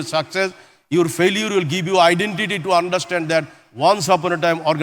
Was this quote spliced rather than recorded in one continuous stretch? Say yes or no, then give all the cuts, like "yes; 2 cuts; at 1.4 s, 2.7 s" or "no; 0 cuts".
no; 0 cuts